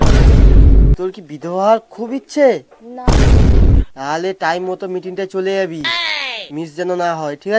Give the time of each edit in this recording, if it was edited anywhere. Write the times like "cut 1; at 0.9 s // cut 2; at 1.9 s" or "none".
cut 1; at 0.9 s